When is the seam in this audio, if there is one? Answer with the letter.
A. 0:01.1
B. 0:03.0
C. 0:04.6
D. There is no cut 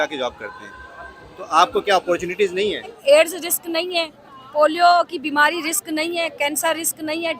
B